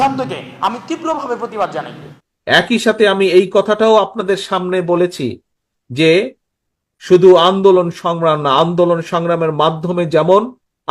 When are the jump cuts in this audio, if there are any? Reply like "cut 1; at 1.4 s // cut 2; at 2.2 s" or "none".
cut 1; at 2.1 s